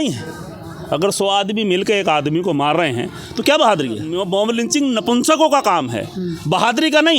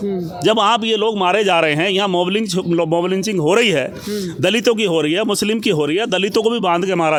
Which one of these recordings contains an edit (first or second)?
first